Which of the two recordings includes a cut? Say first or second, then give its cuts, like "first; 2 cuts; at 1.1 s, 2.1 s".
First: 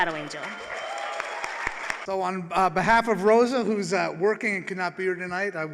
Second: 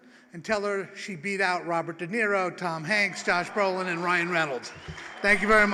first; 1 cut; at 2.0 s